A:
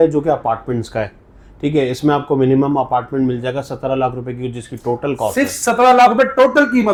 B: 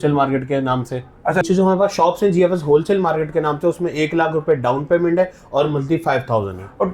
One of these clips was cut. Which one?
B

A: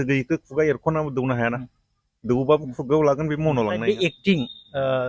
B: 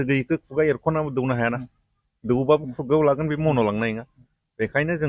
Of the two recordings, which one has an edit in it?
A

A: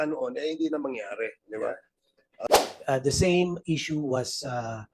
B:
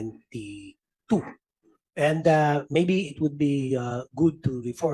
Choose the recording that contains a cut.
A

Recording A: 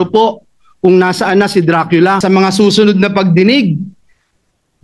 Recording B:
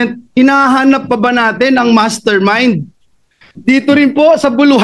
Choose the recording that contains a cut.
A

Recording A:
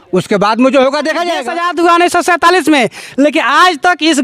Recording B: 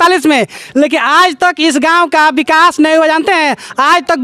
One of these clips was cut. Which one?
A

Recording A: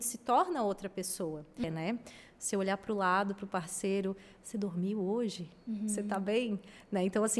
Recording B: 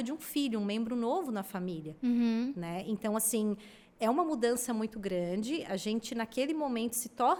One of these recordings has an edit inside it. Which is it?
A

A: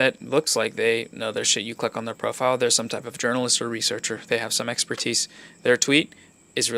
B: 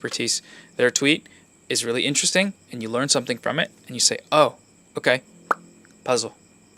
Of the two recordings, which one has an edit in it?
B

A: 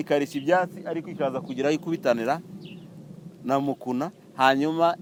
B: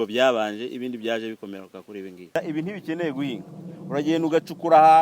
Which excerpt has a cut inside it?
B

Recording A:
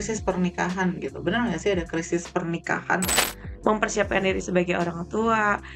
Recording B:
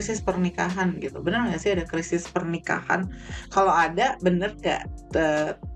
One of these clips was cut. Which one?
A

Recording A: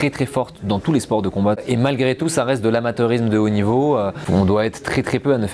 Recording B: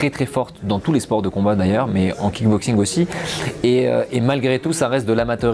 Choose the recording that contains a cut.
A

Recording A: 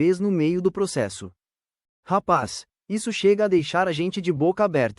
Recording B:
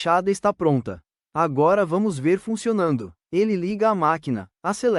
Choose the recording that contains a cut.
A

